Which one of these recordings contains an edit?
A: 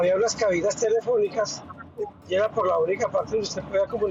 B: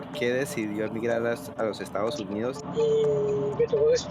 B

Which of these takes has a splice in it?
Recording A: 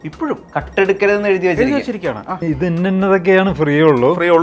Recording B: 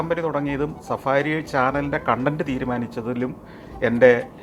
A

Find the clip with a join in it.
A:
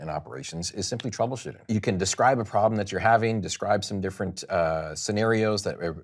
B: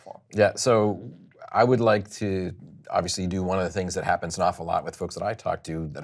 A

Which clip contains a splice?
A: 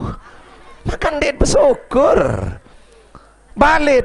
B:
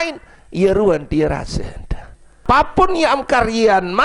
B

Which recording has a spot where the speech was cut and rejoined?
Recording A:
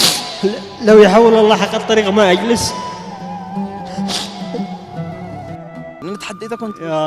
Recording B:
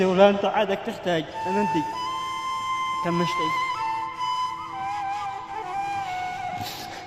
A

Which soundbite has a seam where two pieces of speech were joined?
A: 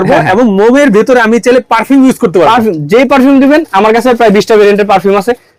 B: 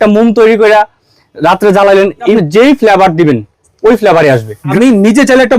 B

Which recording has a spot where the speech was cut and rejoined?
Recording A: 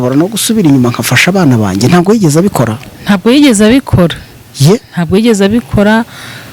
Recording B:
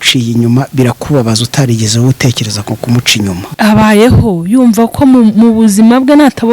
B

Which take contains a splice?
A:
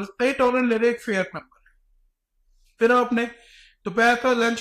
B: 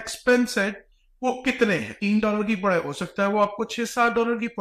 B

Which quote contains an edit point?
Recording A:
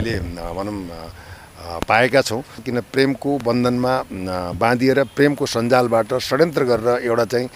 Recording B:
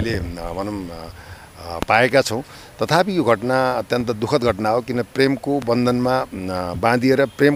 A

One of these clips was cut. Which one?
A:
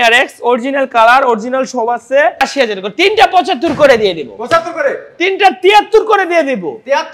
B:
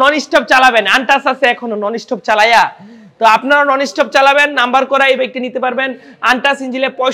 A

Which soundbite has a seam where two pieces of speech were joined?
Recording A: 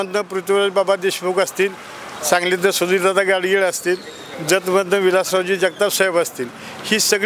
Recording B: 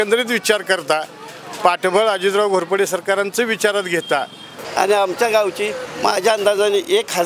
B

